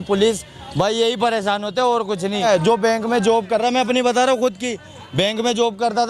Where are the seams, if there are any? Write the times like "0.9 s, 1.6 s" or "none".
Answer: 2.4 s